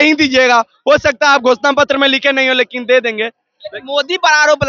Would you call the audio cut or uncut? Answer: uncut